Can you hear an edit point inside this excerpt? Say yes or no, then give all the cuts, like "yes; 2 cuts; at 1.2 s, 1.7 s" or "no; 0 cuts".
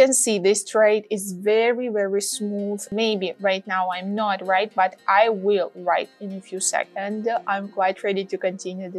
yes; 2 cuts; at 2.9 s, 6.9 s